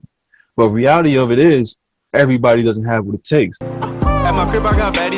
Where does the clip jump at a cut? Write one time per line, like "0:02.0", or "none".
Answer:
0:03.5